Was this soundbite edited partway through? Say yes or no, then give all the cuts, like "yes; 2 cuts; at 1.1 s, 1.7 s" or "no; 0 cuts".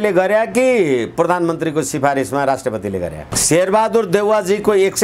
yes; 1 cut; at 3.3 s